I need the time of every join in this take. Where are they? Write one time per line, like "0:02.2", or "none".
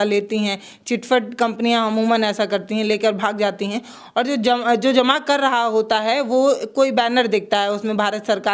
none